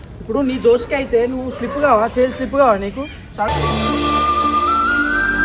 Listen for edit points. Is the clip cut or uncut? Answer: uncut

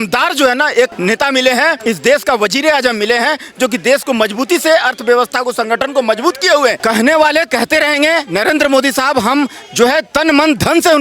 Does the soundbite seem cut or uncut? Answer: cut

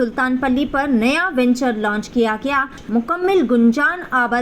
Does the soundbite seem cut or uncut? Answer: cut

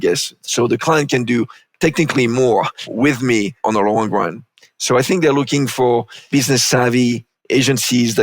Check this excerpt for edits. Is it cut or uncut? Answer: cut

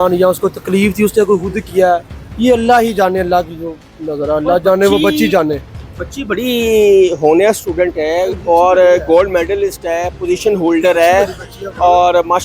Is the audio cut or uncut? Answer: uncut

